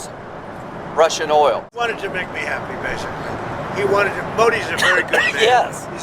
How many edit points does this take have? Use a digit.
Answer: 1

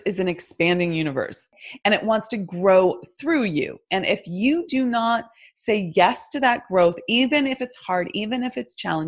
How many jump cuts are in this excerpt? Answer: 1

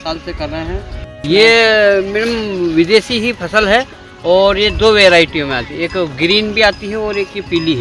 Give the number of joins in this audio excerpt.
1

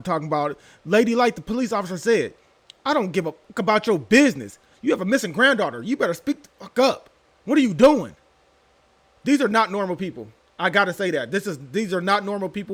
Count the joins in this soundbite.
0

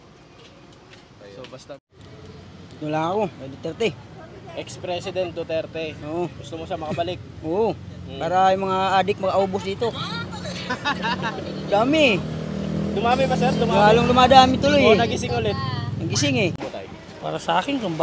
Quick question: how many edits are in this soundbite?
2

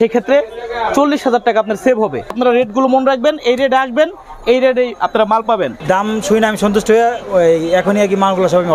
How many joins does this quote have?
2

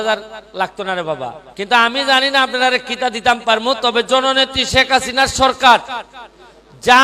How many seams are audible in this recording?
1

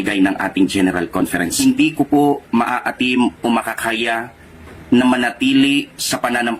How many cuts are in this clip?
2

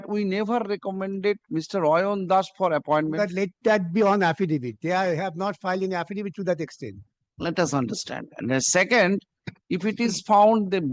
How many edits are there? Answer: 0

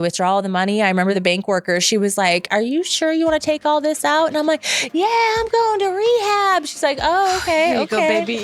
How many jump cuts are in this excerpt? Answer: 1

